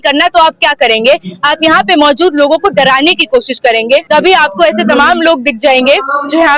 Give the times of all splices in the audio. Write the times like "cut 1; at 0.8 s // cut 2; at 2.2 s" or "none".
cut 1; at 4.0 s